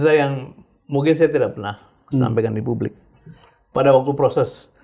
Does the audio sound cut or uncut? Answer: uncut